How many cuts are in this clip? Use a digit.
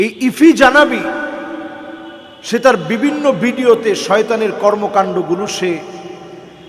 0